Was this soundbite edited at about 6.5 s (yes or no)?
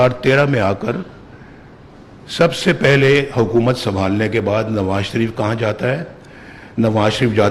no